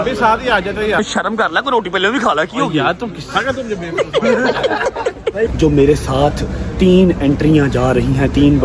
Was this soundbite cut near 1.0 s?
yes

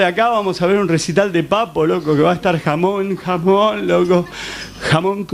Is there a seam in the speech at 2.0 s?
no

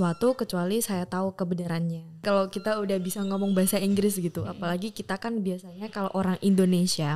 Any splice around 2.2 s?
yes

